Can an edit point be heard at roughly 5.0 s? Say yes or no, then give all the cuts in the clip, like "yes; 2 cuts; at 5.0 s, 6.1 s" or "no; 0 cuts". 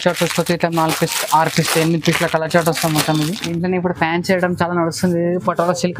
no; 1 cut; at 3.4 s